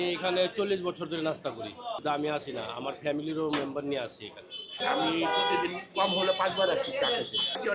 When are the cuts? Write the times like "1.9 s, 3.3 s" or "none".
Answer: none